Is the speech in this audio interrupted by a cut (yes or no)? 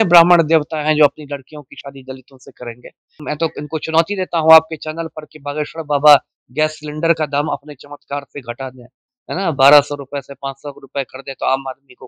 yes